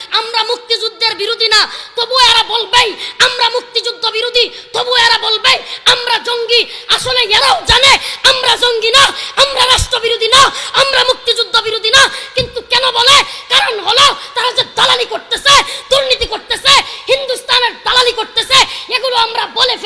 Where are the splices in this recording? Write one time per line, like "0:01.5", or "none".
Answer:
none